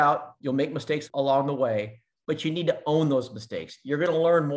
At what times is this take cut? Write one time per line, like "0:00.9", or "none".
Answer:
0:01.1